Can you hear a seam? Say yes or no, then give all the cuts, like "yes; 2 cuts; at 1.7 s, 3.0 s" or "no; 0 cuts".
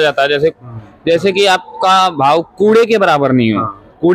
no; 0 cuts